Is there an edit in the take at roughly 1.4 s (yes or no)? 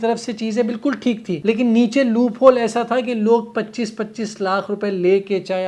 yes